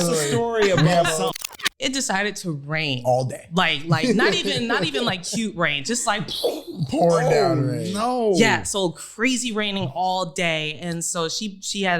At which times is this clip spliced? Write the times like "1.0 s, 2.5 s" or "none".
1.3 s